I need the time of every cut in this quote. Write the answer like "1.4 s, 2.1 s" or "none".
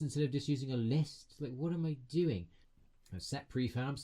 2.5 s